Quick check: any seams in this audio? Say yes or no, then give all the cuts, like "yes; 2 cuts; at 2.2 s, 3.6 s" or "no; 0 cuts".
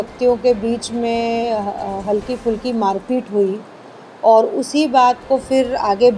no; 0 cuts